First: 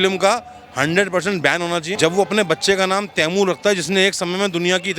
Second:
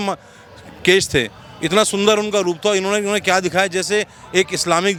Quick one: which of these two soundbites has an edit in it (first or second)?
first